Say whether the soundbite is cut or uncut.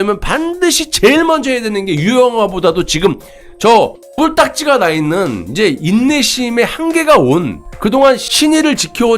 cut